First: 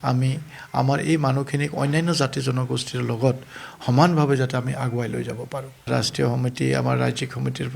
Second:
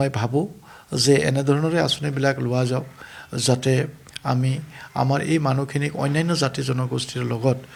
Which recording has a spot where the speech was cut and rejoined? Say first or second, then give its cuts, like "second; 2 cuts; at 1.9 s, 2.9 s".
first; 1 cut; at 5.9 s